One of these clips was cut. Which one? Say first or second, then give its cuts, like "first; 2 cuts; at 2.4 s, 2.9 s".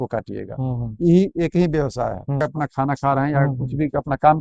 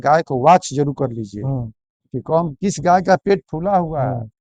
first; 1 cut; at 2.4 s